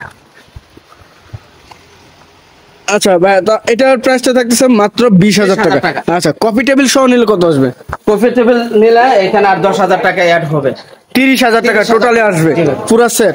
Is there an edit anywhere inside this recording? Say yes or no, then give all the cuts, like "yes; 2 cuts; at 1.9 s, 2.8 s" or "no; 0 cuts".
no; 0 cuts